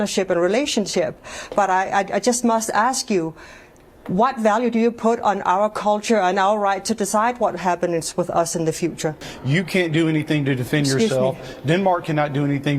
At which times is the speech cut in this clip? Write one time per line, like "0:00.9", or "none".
0:09.3